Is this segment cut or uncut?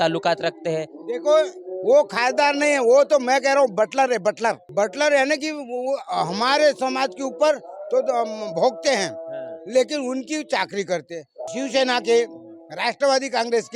cut